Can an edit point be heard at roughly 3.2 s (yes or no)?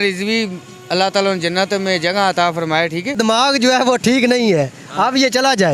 yes